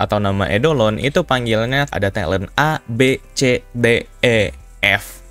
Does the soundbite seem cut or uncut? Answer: cut